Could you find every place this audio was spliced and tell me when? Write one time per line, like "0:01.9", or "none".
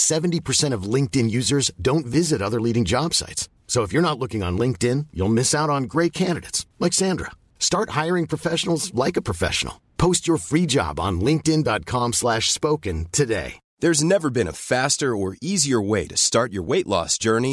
0:13.6